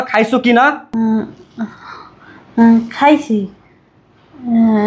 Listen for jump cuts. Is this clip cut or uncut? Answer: uncut